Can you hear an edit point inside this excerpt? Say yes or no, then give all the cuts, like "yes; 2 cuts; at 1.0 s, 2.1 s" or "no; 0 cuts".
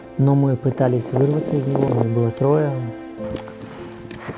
yes; 1 cut; at 1.9 s